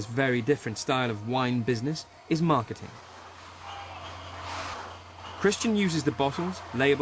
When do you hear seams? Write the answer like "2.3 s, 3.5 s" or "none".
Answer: 1.8 s